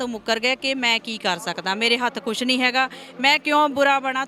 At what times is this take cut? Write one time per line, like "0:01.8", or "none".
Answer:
none